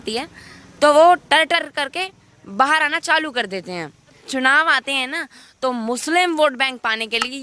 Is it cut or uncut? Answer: cut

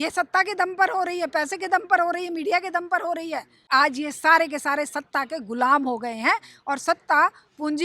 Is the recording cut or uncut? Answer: cut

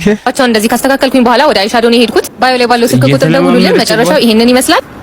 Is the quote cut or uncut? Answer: cut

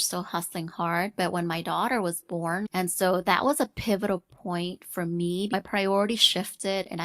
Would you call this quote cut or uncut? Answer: cut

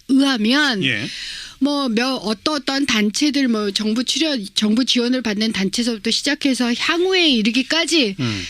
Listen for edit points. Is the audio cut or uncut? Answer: cut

